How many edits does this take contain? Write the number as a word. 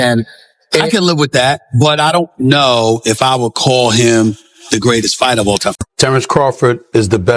one